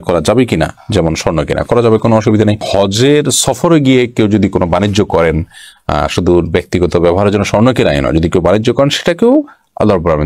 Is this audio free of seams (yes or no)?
yes